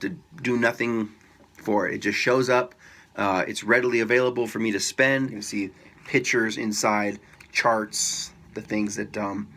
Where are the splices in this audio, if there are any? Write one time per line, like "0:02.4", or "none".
0:05.4